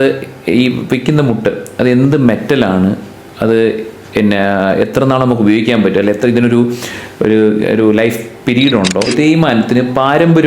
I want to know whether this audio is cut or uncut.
cut